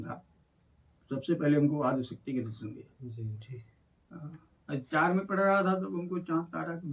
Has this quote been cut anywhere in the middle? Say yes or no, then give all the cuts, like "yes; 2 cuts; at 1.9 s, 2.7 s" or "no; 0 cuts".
no; 0 cuts